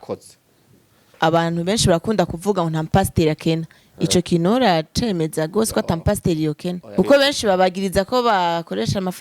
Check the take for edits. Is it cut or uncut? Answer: cut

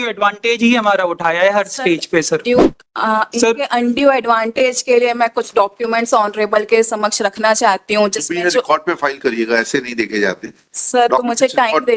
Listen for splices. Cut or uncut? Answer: uncut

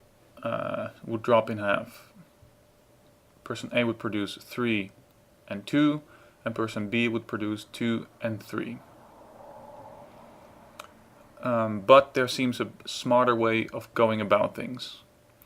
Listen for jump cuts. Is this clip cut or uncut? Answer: cut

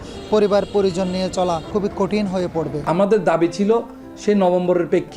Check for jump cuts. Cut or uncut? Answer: cut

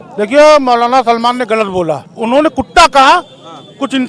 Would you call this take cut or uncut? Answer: cut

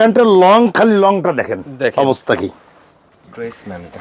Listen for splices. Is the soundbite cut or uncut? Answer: uncut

